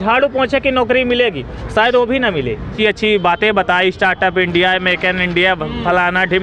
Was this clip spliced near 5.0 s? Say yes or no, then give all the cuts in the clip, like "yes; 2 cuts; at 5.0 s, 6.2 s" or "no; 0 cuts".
no; 1 cut; at 2.7 s